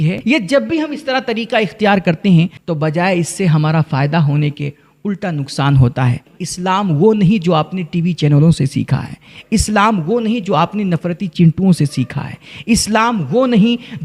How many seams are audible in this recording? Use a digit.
2